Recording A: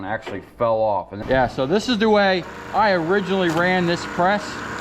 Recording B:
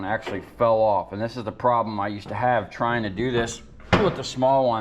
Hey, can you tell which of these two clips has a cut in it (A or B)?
A